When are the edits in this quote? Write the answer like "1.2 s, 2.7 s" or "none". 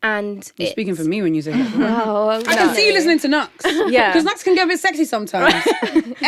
2.4 s

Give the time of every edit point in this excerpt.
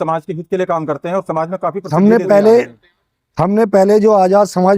1.8 s

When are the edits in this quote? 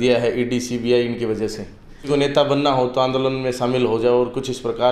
2.0 s

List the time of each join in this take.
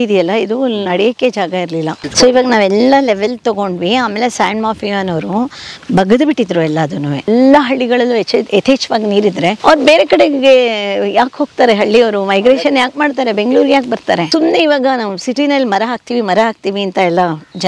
2.0 s, 7.2 s, 9.6 s, 14.3 s

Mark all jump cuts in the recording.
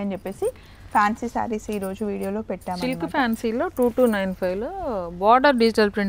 none

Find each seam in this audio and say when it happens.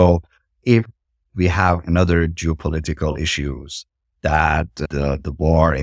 4.9 s

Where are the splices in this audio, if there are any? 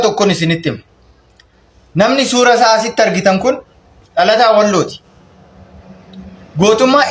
none

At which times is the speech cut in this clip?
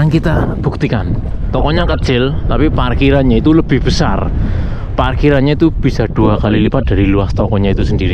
1.5 s

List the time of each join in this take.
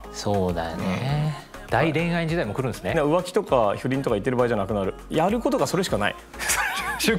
1.5 s, 2.9 s, 5.1 s

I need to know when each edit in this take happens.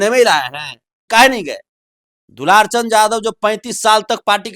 1.0 s

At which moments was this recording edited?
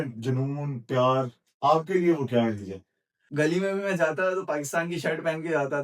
3.2 s

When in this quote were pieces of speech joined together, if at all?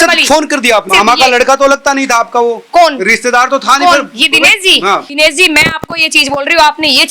0.9 s, 5.1 s

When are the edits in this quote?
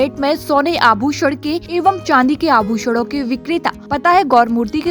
1.6 s, 3.8 s

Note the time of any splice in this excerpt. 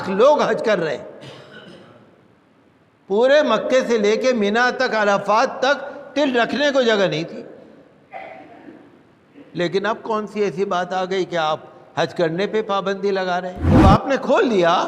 13.6 s

